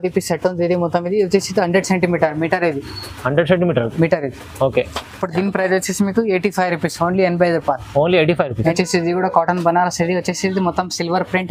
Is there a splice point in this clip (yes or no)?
no